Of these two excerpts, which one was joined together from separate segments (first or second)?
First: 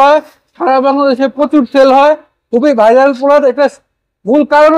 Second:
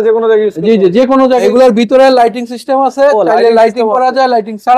second